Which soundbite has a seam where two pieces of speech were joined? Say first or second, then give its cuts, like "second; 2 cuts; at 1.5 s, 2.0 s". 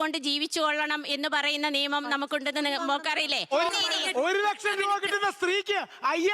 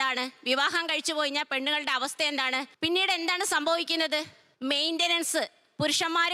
first; 1 cut; at 3.6 s